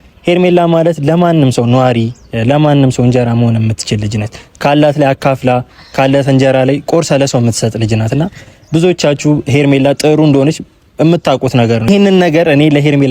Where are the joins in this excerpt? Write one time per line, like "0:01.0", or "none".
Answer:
0:11.9